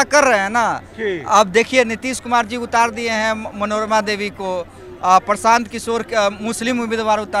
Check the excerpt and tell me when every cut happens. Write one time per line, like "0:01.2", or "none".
none